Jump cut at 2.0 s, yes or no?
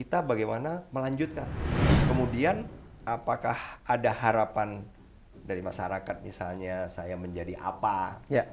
yes